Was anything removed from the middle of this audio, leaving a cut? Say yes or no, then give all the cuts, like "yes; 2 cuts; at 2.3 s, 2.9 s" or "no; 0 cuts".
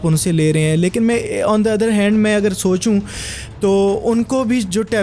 no; 0 cuts